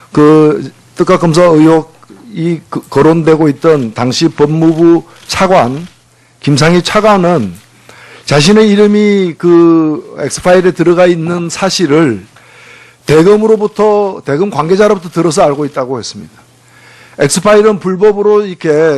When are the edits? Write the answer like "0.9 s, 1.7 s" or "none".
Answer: 4.9 s